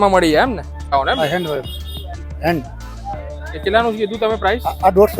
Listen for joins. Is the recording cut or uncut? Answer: cut